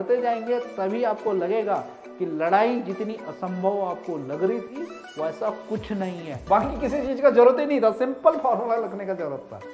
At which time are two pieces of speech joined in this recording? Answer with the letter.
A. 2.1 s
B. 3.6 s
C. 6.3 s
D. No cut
C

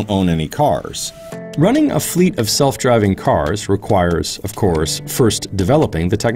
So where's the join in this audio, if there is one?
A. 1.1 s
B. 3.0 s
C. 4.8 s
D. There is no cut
D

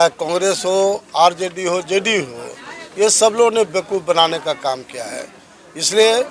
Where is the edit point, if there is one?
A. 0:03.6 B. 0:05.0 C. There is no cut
C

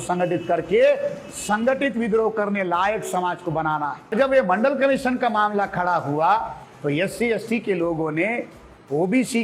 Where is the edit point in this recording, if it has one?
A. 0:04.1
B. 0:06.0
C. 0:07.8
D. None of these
A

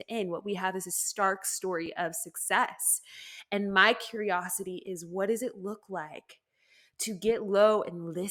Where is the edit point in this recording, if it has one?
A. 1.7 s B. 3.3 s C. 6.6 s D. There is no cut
D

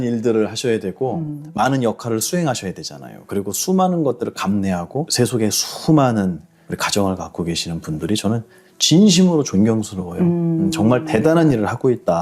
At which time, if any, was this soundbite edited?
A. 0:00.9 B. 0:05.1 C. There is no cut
B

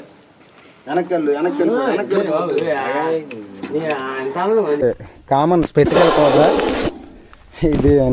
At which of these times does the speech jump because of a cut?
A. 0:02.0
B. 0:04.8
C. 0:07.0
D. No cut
B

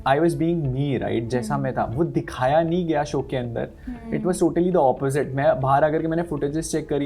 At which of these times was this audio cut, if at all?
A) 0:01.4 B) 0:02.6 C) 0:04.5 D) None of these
D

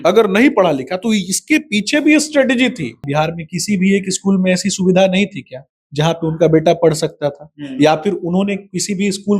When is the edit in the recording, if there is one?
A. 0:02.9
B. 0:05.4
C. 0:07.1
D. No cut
A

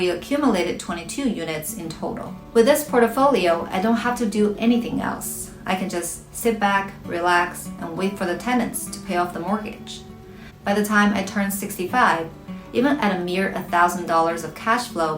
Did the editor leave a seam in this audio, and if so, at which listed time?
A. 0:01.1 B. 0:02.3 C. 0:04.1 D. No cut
B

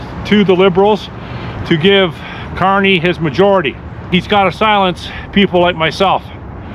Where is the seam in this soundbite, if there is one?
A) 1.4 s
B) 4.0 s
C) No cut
B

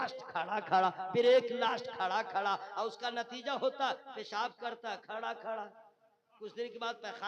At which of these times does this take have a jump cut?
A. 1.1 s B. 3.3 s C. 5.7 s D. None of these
D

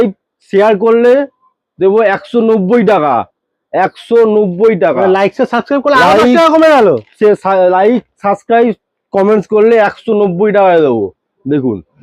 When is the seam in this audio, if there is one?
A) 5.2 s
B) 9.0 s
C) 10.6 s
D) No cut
D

